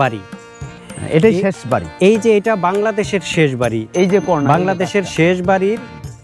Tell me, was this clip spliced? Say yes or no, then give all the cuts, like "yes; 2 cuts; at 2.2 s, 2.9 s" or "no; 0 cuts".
no; 0 cuts